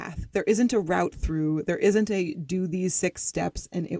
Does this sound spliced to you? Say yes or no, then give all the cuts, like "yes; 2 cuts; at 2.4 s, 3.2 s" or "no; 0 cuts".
no; 0 cuts